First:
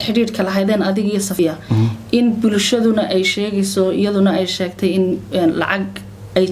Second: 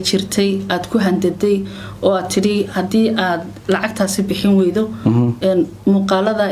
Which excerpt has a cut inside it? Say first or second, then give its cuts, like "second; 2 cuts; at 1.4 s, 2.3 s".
first; 1 cut; at 1.4 s